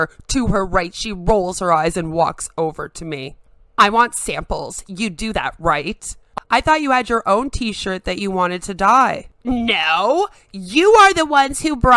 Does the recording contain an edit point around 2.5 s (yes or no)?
no